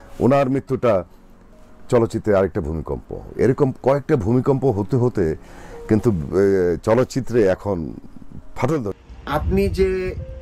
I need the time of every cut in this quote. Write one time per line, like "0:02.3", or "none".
0:08.9